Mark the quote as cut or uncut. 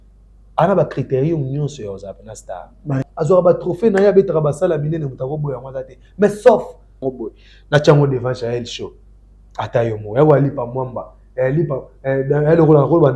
cut